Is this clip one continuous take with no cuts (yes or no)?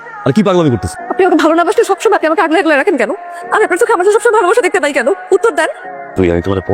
no